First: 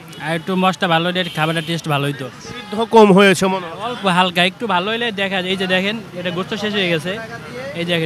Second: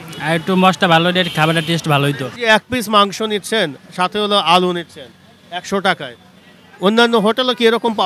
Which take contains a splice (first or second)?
second